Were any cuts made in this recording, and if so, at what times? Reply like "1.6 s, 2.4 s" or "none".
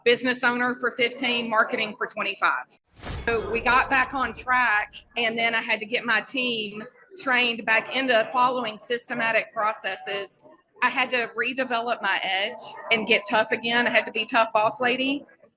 3.2 s